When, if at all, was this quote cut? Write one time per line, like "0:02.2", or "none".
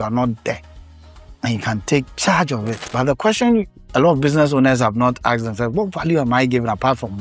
0:02.8